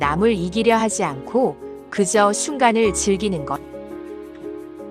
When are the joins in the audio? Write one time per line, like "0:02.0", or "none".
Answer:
0:03.7